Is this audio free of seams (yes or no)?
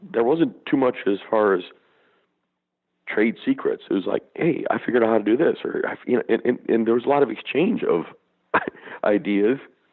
yes